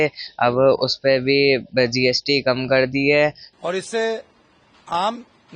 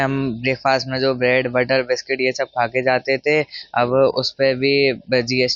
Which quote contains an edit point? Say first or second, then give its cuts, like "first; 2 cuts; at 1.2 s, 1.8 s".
first; 1 cut; at 3.6 s